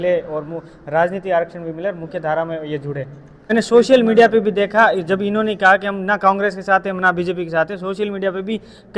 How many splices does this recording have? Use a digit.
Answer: 1